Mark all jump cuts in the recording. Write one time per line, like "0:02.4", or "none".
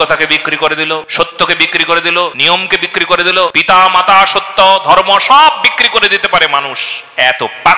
0:01.1
0:02.4
0:03.6